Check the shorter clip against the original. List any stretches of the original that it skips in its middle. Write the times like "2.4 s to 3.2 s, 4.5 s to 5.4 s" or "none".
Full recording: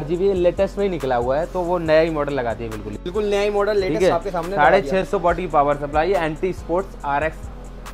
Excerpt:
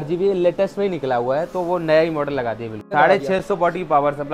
2.8 s to 4.4 s

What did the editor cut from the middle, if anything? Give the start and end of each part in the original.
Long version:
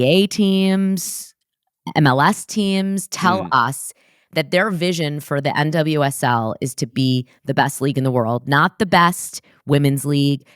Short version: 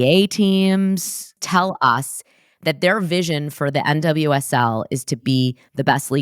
1.4 s to 3.1 s

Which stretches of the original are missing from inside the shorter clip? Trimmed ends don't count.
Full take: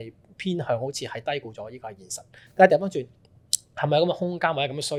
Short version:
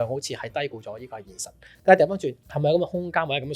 3.2 s to 3.7 s

